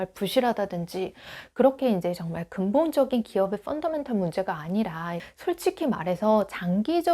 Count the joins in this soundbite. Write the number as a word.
one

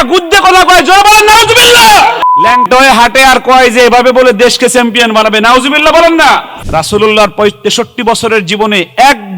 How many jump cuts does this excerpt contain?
two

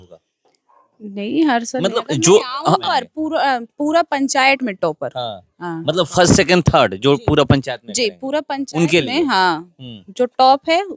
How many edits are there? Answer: one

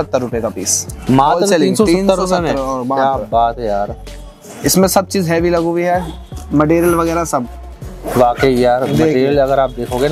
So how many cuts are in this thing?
zero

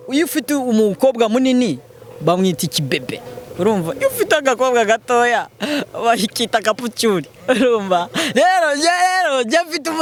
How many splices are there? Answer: zero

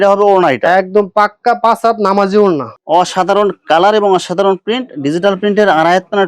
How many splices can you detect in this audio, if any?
one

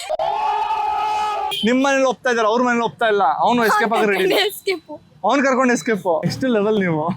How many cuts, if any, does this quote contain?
two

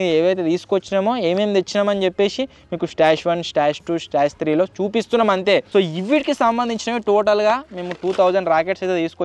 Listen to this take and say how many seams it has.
one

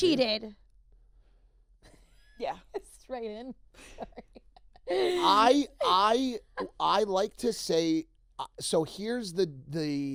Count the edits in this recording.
zero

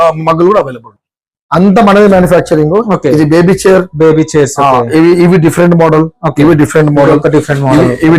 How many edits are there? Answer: one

